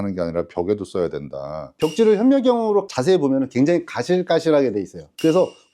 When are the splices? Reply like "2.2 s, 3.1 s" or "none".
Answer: 1.7 s